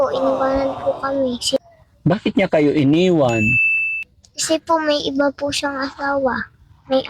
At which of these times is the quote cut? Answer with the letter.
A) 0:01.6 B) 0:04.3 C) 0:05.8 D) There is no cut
A